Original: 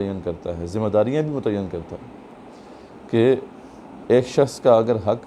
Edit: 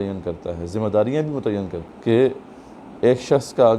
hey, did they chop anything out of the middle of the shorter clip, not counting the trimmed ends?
yes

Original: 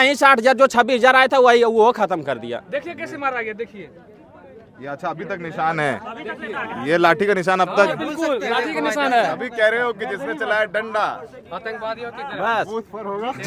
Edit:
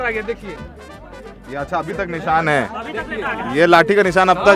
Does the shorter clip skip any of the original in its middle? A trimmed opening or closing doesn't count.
no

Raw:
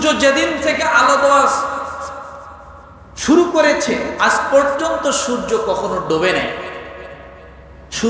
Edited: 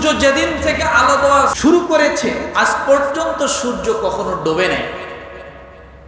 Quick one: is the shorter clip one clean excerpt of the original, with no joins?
no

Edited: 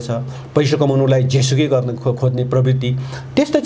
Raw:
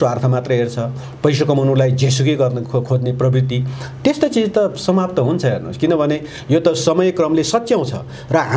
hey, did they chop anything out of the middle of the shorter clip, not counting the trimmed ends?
no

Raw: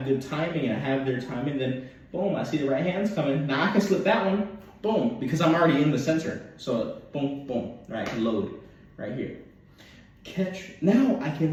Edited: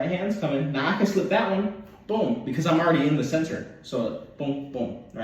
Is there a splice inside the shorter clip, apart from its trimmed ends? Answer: no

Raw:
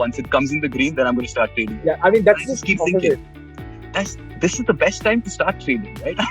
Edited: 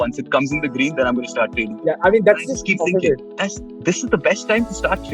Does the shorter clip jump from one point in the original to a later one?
yes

